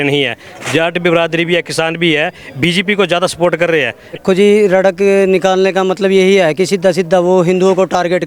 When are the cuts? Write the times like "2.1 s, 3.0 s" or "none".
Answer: 4.2 s